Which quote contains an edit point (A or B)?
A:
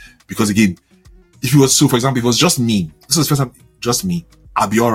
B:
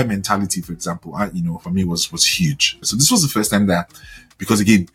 B